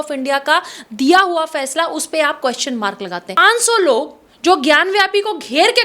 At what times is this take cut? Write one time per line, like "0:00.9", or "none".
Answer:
0:03.4